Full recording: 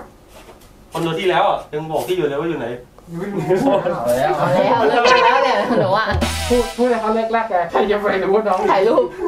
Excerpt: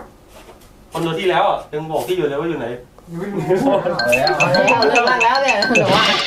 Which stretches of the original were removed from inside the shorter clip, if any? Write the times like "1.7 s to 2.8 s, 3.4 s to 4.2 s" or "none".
none